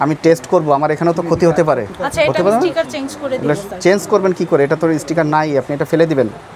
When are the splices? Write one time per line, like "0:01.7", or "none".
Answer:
none